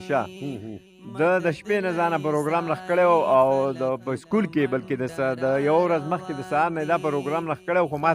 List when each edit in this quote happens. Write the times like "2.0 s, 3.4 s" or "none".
none